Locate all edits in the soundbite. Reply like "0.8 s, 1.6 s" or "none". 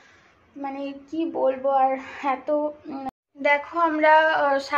3.4 s